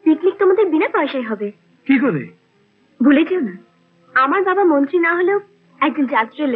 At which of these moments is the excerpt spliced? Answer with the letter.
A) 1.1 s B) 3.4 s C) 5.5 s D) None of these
D